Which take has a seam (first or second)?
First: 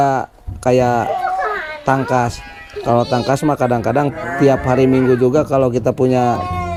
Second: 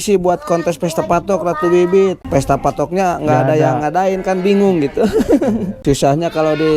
second